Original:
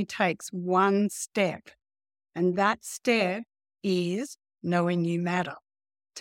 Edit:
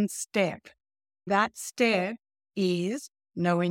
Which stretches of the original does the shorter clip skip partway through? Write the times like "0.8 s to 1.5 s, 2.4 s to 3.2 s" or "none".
2.3 s to 2.5 s